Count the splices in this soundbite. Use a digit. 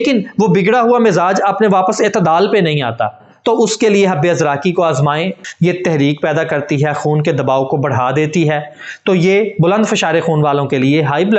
1